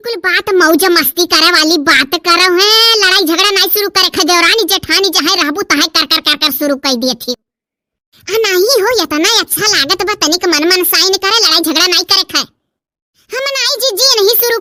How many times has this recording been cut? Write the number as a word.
zero